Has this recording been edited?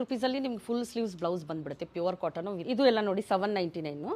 yes; 1 cut; at 2.6 s

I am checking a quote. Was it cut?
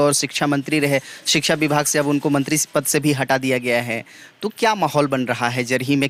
no; 0 cuts

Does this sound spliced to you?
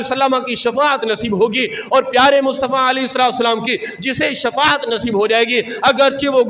no; 0 cuts

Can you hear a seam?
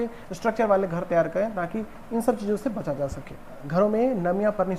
yes; 1 cut; at 3.6 s

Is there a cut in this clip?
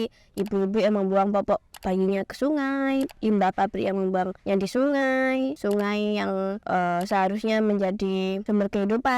yes; 4 cuts; at 4.4 s, 5.6 s, 6.6 s, 8.4 s

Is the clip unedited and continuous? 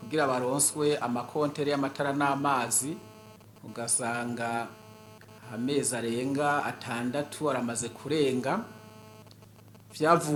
yes; 0 cuts

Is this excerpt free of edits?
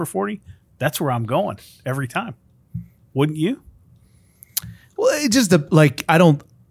yes; 0 cuts

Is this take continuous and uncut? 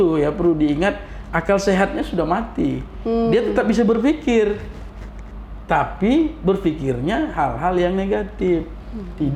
yes; 0 cuts

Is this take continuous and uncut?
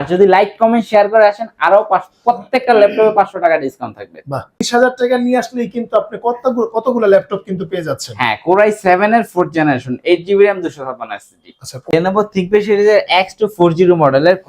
no; 2 cuts; at 4.6 s, 11.9 s

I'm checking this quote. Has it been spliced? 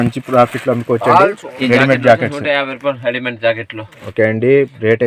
yes; 1 cut; at 1.5 s

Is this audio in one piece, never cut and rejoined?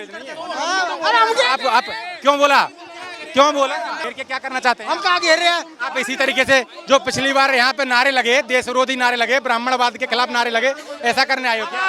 yes; 0 cuts

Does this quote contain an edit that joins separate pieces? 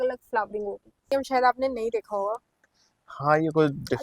yes; 1 cut; at 1.1 s

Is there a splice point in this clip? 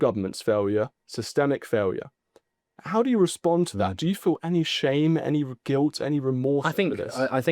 no; 0 cuts

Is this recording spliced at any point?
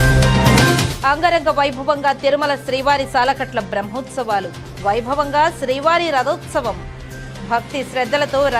yes; 1 cut; at 0.9 s

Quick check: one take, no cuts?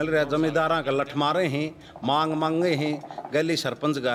yes; 0 cuts

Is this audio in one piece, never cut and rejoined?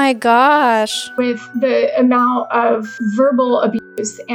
no; 2 cuts; at 1.2 s, 2.9 s

